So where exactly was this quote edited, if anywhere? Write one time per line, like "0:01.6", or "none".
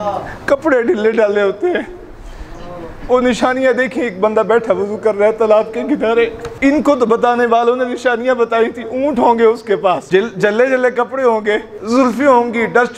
0:06.5
0:10.0
0:11.7

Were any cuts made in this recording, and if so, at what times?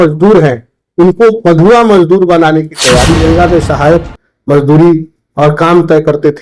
0:03.2

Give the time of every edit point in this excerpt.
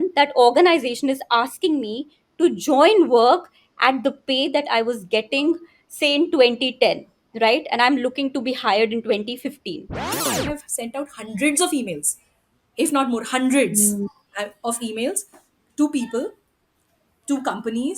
0:10.2

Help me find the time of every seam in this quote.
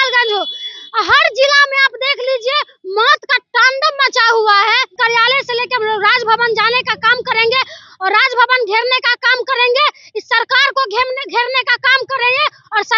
0:04.9

